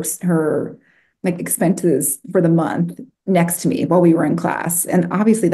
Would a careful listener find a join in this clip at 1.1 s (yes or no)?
yes